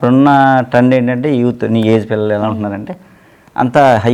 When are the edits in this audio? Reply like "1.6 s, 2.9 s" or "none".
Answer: none